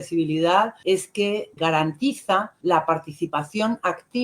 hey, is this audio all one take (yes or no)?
no